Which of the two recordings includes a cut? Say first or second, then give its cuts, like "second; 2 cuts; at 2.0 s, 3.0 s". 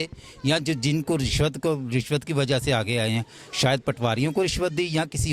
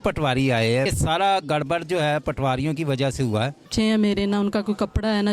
second; 2 cuts; at 0.9 s, 3.7 s